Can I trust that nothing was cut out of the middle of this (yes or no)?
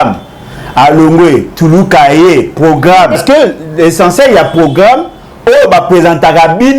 no